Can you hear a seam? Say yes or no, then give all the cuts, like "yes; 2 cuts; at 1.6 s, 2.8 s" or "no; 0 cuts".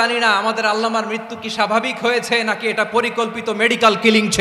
no; 0 cuts